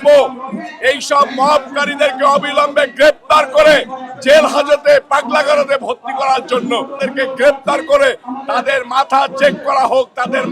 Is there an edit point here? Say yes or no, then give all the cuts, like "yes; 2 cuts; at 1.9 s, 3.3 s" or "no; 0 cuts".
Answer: yes; 1 cut; at 6.9 s